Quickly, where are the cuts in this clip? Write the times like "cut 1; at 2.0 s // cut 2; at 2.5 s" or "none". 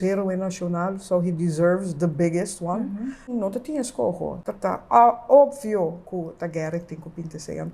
cut 1; at 3.3 s // cut 2; at 4.4 s